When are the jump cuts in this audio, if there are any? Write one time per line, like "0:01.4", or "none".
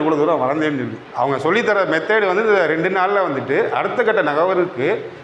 0:00.9